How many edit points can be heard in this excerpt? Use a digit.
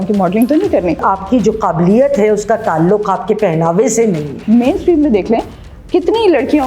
2